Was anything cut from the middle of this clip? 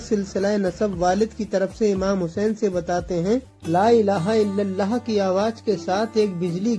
yes; 1 cut; at 3.5 s

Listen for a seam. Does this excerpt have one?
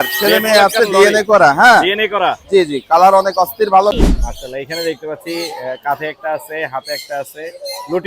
yes; 1 cut; at 4.0 s

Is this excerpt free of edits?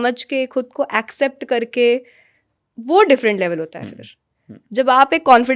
yes; 0 cuts

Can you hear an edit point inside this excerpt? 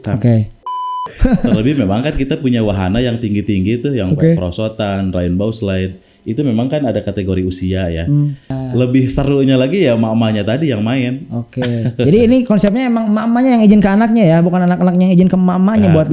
yes; 2 cuts; at 1.0 s, 8.5 s

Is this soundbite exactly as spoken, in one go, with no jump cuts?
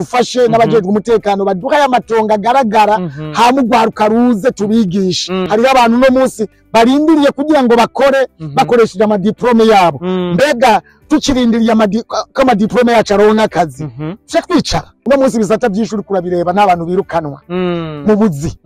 no; 2 cuts; at 5.3 s, 14.9 s

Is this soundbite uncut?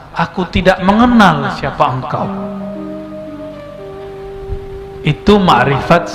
yes; 0 cuts

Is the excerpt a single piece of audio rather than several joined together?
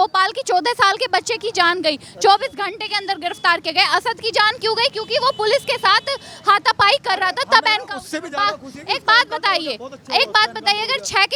yes; 0 cuts

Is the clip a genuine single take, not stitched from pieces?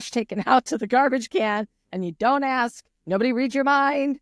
yes; 0 cuts

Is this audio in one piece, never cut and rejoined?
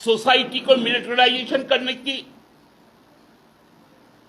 no; 1 cut; at 3.2 s

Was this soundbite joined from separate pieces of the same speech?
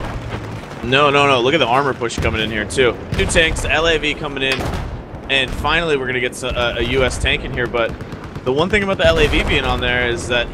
no; 0 cuts

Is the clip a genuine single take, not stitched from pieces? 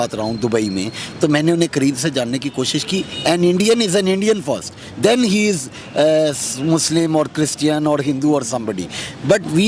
yes; 0 cuts

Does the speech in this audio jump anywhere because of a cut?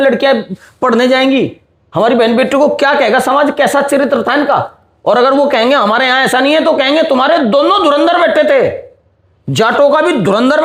no; 0 cuts

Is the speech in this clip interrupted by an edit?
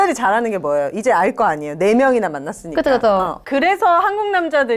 yes; 1 cut; at 3.4 s

